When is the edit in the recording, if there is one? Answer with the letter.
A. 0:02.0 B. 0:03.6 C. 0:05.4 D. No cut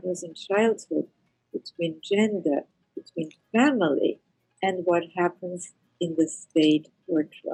D